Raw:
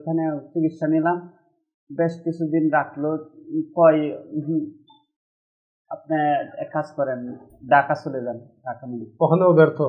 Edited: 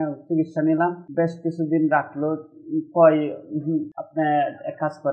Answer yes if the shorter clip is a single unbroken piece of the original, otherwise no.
no